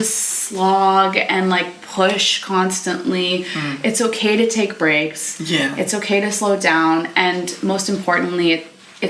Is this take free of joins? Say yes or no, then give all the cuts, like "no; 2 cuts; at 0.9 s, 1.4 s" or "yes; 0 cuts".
yes; 0 cuts